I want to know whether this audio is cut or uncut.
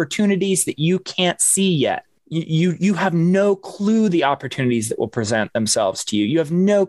cut